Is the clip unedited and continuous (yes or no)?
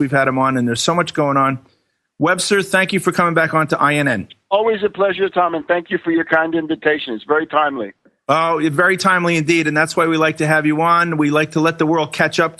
yes